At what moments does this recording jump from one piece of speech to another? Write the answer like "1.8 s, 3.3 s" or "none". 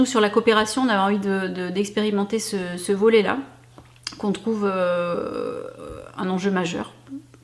none